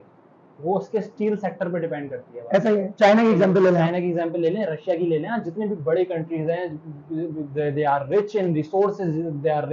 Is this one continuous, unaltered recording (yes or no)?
yes